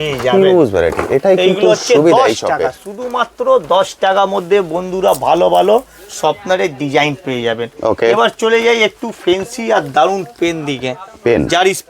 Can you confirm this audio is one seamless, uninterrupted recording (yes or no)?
yes